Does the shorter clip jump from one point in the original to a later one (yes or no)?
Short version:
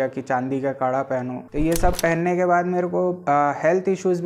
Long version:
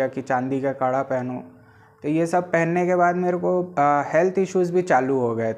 yes